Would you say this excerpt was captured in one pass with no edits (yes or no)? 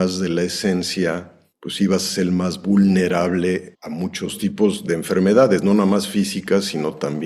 yes